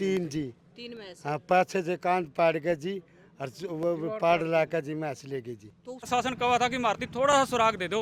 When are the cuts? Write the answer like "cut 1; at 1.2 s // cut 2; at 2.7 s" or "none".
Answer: cut 1; at 6.1 s